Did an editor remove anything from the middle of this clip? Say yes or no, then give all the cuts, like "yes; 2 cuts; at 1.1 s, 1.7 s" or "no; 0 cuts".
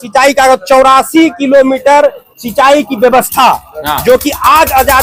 no; 0 cuts